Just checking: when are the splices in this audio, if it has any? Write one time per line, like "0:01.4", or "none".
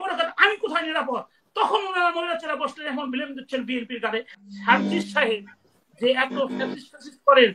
0:04.3